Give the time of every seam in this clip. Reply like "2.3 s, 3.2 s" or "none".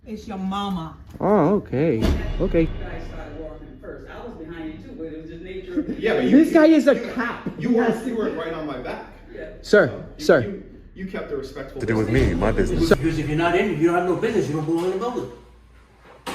2.7 s, 11.8 s